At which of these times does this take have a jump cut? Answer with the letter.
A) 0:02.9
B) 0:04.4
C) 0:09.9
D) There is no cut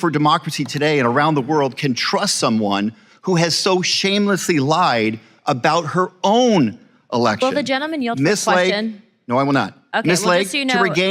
D